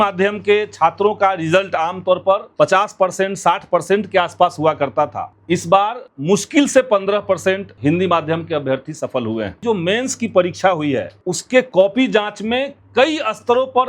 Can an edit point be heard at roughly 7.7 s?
yes; 6 cuts; at 2.5 s, 5.3 s, 6.1 s, 7.7 s, 9.6 s, 11.1 s

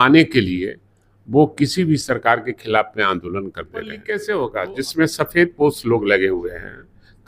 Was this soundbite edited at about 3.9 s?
yes; 1 cut; at 3.9 s

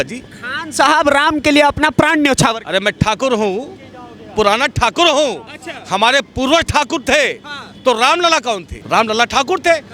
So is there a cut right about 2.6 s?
no; 0 cuts

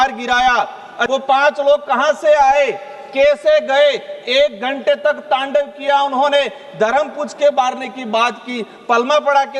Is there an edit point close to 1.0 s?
yes; 1 cut; at 1.0 s

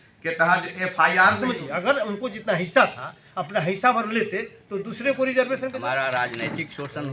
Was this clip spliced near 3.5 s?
no; 2 cuts; at 1.4 s, 5.8 s

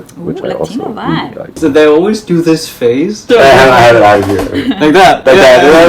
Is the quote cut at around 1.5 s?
yes; 1 cut; at 1.5 s

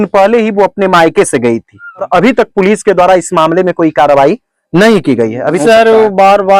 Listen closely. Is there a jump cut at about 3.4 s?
no; 2 cuts; at 2.1 s, 5.6 s

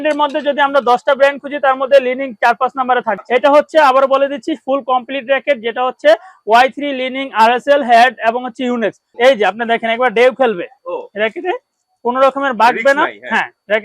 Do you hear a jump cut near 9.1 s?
yes; 2 cuts; at 3.2 s, 9.1 s

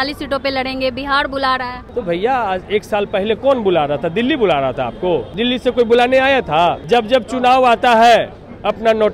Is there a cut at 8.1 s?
no; 3 cuts; at 1.8 s, 5.3 s, 6.8 s

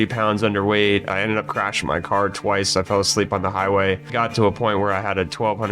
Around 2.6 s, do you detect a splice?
no; 2 cuts; at 1.1 s, 4.1 s

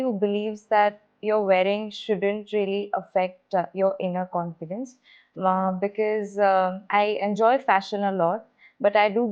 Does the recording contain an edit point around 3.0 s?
no; 1 cut; at 1.0 s

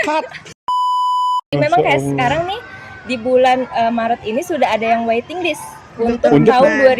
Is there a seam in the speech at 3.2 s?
no; 1 cut; at 1.5 s

